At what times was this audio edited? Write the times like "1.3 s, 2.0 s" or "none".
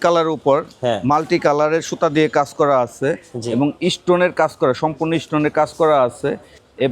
none